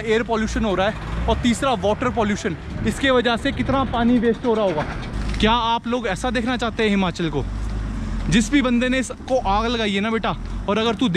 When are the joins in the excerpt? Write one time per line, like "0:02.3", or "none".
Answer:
0:05.1